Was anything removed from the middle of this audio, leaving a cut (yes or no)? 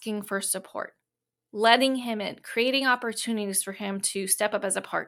no